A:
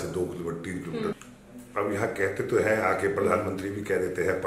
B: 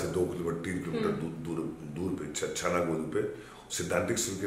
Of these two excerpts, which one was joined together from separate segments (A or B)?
A